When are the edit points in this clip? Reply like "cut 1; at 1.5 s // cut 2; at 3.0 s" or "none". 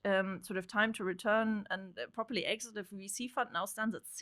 none